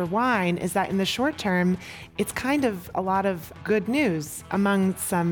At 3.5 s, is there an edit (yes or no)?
yes